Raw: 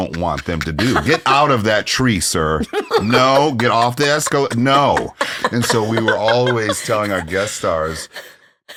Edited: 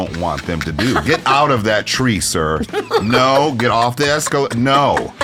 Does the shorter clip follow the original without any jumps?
yes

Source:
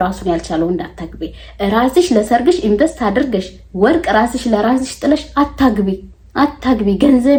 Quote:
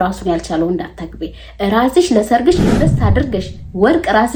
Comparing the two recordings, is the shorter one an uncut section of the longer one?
yes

